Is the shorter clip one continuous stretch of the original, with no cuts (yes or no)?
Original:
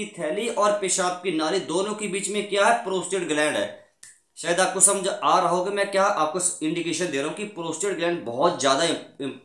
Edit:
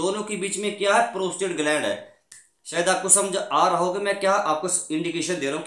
yes